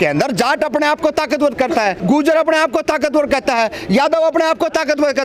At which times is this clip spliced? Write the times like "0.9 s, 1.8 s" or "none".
2.0 s